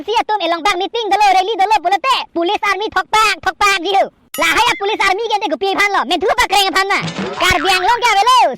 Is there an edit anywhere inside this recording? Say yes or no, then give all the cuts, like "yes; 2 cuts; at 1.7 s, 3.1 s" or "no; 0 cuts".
yes; 1 cut; at 7.2 s